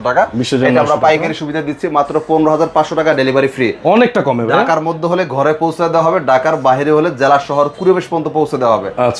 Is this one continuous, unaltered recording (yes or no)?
yes